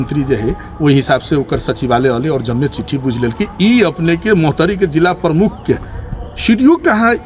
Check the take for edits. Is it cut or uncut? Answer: uncut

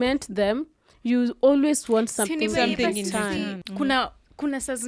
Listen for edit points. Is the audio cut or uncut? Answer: cut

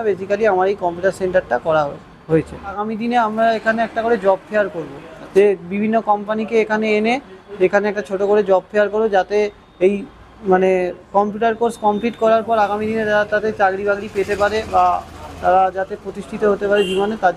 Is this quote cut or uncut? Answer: cut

